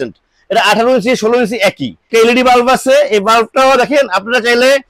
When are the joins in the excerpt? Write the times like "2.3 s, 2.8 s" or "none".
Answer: 2.0 s